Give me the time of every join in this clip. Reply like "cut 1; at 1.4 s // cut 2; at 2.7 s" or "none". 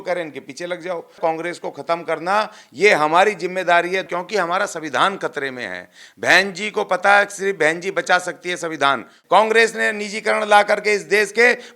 cut 1; at 1.2 s // cut 2; at 4.1 s // cut 3; at 9.1 s